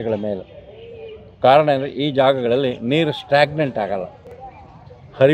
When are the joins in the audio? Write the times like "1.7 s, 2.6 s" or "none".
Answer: none